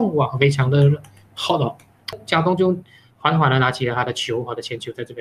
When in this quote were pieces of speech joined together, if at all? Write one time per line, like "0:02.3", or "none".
0:02.2